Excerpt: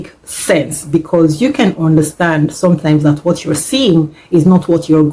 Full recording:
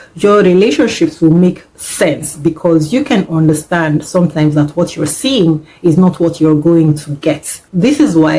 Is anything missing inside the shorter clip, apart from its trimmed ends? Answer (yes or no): no